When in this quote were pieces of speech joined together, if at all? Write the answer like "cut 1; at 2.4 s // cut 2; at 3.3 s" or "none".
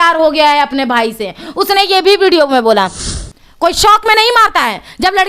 cut 1; at 3.0 s